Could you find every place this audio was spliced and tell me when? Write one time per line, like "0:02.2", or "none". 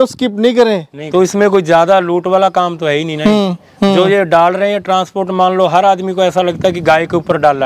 0:00.9

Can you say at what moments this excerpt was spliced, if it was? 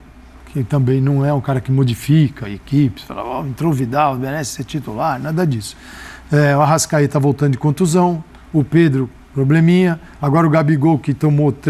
none

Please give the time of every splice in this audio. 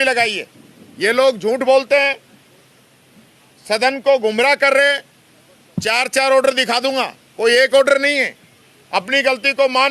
none

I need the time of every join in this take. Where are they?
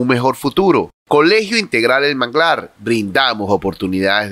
0:01.0

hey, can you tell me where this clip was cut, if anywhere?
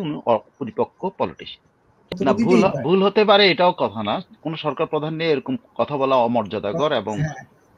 0:02.1

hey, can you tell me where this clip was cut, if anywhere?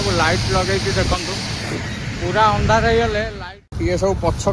0:03.3

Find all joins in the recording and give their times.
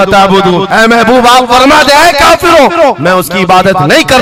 none

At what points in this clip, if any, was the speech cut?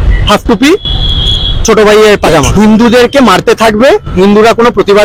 0:02.5

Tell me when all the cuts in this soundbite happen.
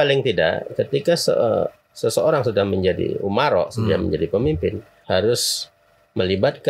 0:04.9

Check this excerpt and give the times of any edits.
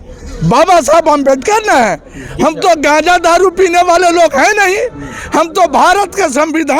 none

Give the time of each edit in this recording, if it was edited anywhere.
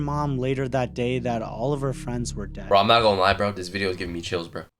0:02.7

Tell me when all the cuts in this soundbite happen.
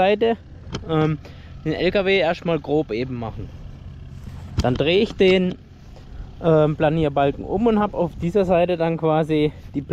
none

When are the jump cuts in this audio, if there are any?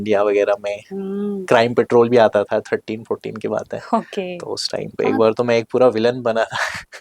none

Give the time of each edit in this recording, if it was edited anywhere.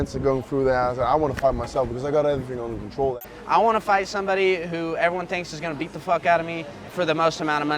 0:03.2
0:06.8

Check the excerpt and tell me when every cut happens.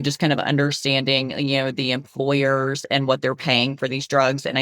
none

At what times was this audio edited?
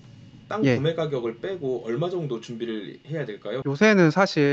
0:03.6

